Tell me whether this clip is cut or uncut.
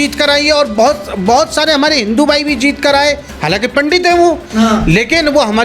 cut